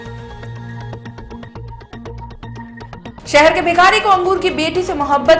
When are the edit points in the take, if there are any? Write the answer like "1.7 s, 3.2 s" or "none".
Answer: 3.1 s

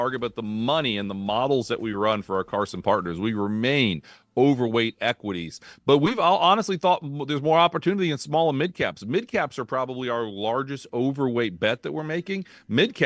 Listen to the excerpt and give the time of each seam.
none

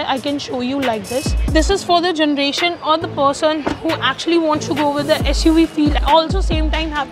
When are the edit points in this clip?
1.4 s

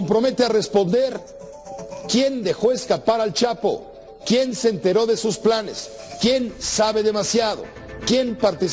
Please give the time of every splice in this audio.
4.6 s

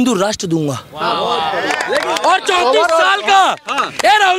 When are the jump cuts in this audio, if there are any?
none

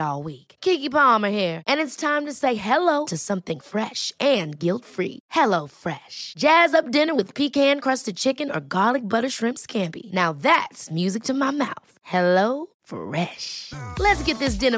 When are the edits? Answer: none

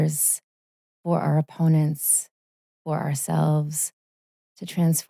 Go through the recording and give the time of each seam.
none

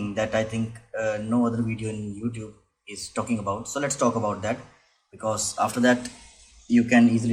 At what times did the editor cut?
none

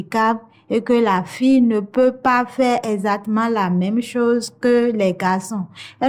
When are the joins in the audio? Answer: none

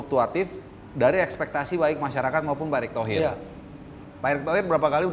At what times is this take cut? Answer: none

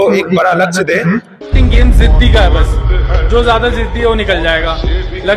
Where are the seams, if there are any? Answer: 1.3 s

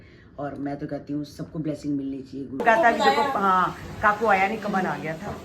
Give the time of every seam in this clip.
2.6 s

